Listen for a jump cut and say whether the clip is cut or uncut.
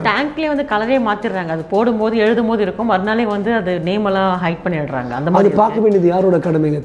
uncut